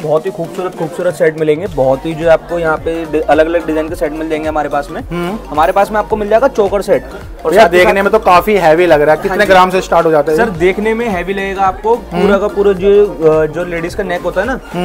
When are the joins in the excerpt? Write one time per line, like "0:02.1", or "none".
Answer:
none